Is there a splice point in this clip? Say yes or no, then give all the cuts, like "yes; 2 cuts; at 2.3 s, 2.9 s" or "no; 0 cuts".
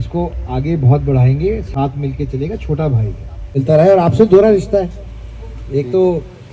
yes; 1 cut; at 3.6 s